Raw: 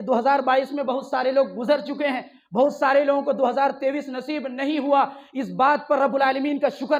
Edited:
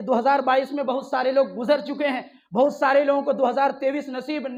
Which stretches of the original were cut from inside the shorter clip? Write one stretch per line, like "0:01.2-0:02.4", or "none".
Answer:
none